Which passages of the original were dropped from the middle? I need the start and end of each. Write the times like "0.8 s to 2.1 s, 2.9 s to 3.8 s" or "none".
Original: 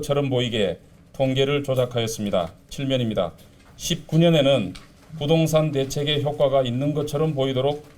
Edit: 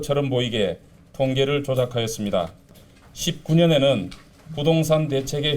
2.7 s to 3.4 s